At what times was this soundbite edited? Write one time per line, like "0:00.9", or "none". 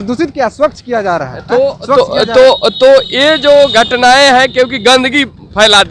none